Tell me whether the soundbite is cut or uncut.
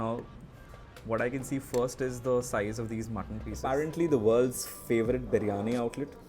cut